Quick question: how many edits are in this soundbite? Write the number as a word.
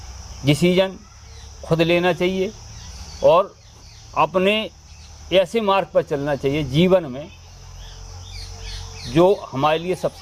zero